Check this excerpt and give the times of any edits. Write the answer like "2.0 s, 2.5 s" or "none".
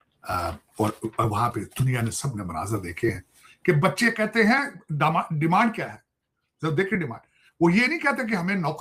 none